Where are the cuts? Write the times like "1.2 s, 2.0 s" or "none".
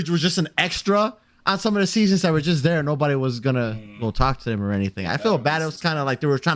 none